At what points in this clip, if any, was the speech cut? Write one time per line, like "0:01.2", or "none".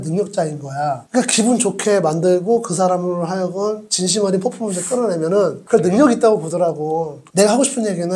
0:07.2